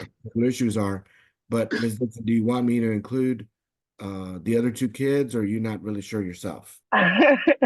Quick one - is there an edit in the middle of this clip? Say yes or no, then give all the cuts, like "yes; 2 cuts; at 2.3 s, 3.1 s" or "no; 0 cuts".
yes; 1 cut; at 6.7 s